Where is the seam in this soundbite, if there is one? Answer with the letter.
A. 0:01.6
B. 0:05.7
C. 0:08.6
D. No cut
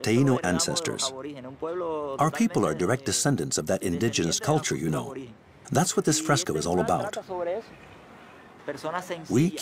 C